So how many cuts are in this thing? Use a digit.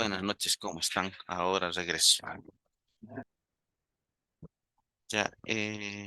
1